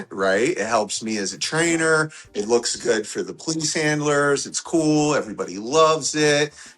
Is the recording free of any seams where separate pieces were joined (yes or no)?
yes